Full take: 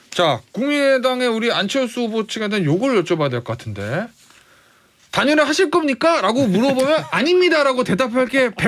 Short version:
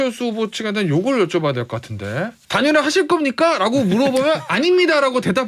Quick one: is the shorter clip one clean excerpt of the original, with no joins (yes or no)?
no